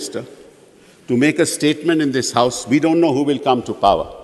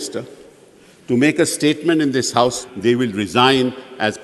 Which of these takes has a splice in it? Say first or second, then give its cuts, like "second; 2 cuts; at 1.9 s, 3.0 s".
second; 1 cut; at 2.6 s